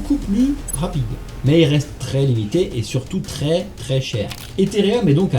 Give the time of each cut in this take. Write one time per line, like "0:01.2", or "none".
0:04.4